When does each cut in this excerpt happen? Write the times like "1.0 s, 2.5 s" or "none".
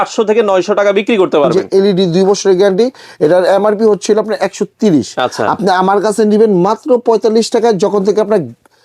1.6 s